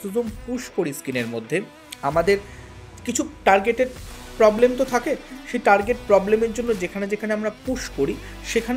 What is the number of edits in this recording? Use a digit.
1